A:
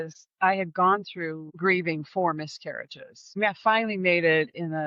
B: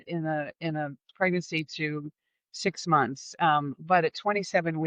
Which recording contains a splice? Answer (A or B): A